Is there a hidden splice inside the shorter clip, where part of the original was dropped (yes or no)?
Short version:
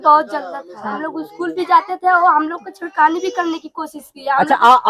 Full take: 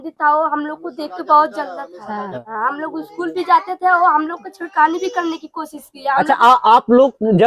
yes